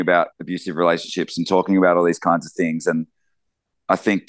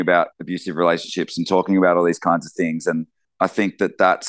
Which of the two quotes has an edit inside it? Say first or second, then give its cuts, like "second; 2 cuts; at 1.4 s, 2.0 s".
second; 1 cut; at 3.2 s